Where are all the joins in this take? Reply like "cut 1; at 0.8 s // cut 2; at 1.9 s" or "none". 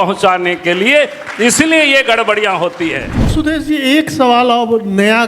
cut 1; at 3.3 s